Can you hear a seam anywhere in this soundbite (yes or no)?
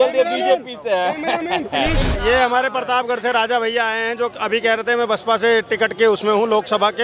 yes